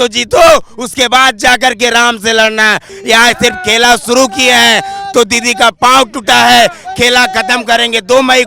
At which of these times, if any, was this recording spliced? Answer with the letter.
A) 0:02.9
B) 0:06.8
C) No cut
A